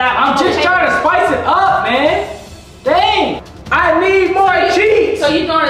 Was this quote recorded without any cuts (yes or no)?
no